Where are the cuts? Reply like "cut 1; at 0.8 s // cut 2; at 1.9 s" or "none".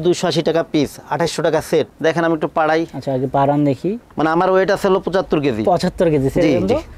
cut 1; at 1.9 s // cut 2; at 4.1 s